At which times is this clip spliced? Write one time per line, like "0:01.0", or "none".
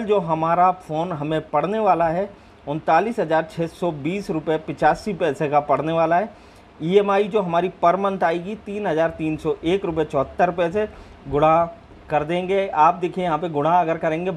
none

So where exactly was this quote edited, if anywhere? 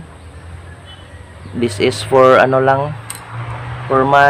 none

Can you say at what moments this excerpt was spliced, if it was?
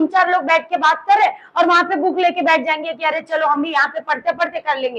none

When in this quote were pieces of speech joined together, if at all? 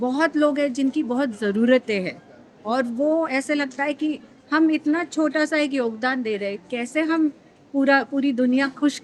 none

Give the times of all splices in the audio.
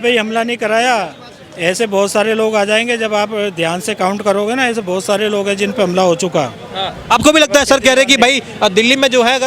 none

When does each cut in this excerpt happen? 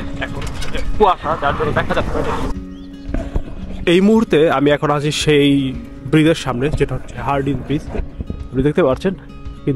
0:02.6

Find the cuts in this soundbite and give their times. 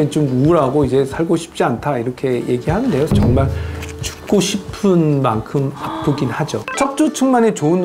0:06.7

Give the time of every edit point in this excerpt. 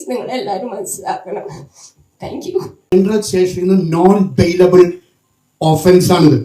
0:02.9

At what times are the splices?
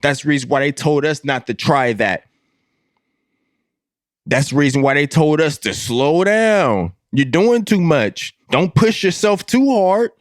none

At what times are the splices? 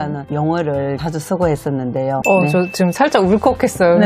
0:02.2

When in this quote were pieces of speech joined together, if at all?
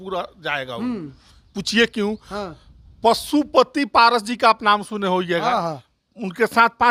none

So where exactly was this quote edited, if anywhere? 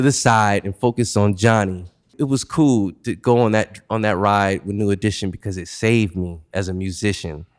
0:02.2

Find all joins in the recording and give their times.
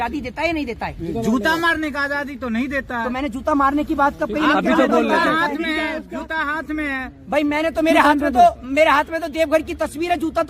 none

